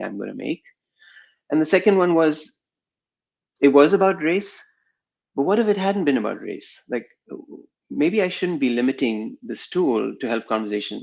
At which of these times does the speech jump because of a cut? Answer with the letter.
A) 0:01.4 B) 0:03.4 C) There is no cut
B